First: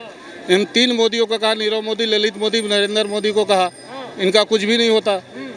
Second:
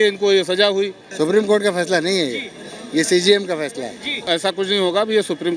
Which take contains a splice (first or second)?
second